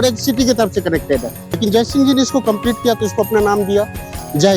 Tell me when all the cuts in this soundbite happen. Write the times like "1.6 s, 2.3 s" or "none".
1.6 s